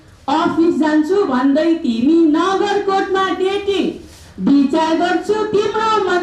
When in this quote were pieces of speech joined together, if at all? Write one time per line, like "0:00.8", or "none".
none